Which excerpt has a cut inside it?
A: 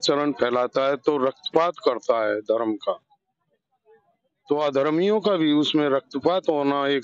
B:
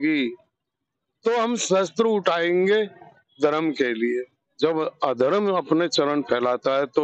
B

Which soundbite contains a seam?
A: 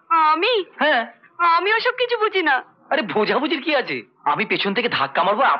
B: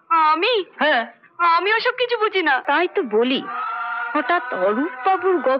B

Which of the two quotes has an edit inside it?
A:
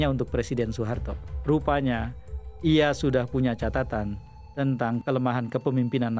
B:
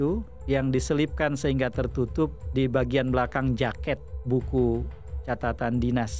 A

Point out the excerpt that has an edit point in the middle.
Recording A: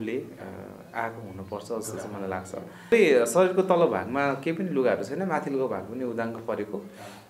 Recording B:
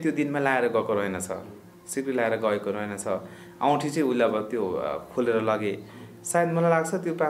A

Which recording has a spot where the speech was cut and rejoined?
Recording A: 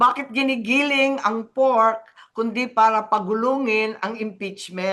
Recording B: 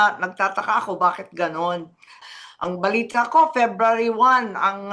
B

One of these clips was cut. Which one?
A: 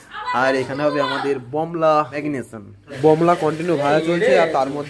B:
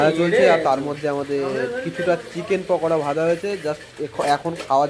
A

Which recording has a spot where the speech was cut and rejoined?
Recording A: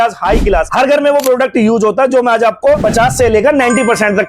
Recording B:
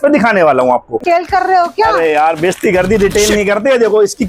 B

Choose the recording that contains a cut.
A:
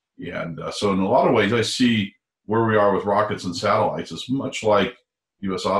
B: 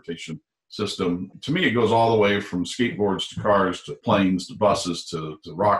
B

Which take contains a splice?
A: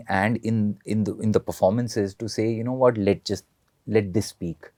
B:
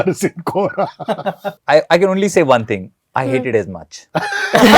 B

